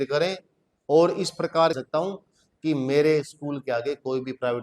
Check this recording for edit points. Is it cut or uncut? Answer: cut